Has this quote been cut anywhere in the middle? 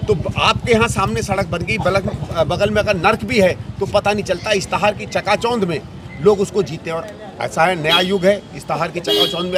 no; 0 cuts

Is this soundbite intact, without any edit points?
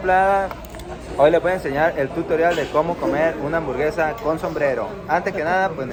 yes; 0 cuts

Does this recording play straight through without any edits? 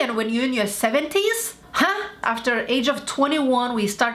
no; 1 cut; at 2.2 s

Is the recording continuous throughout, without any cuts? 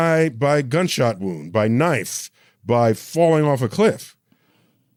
yes; 0 cuts

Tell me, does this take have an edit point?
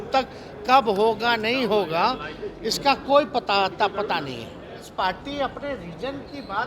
yes; 1 cut; at 4.9 s

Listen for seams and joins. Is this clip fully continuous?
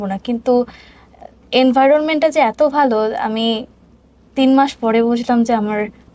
yes; 0 cuts

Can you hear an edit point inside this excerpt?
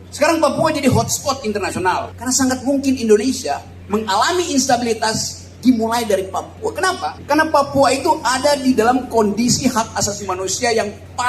yes; 3 cuts; at 2.1 s, 3.7 s, 7.2 s

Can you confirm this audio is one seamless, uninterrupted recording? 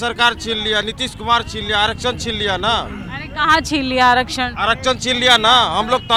yes; 0 cuts

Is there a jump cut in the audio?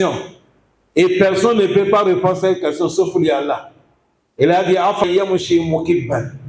yes; 1 cut; at 5.0 s

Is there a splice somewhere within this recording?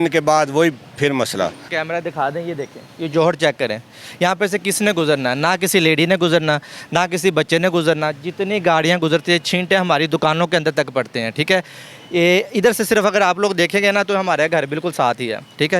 yes; 1 cut; at 1.8 s

